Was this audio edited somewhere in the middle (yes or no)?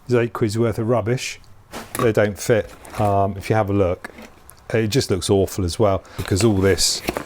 yes